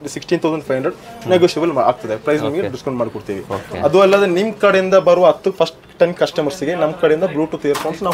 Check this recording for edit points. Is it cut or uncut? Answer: uncut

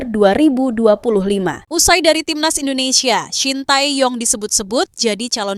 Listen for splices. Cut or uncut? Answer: cut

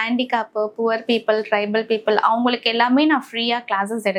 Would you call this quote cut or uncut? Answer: uncut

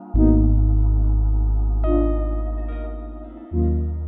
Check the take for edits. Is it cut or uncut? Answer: uncut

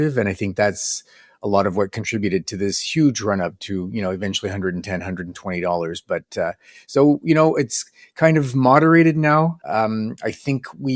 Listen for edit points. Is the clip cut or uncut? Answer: uncut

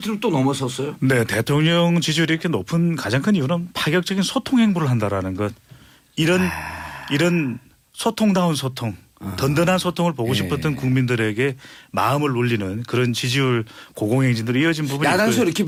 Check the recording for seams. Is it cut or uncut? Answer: uncut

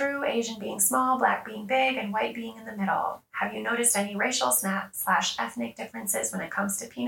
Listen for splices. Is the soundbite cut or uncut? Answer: uncut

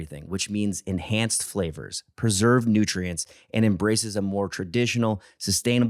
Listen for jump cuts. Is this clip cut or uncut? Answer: uncut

